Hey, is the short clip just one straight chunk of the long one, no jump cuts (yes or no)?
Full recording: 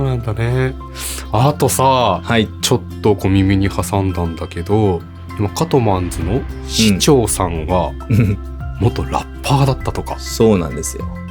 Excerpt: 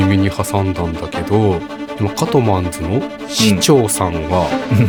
yes